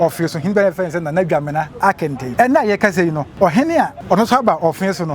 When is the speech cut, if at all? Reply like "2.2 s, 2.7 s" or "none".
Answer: 2.2 s, 3.2 s, 4.0 s